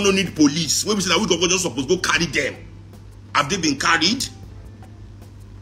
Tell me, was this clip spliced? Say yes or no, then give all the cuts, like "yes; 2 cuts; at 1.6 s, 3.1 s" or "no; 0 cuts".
no; 0 cuts